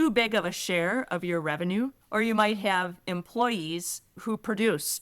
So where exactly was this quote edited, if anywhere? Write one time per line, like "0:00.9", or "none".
0:02.0
0:04.2

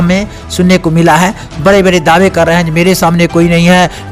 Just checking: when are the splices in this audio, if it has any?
none

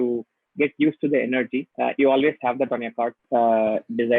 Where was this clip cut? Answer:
0:03.2

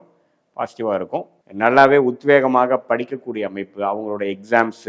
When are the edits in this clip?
0:01.4

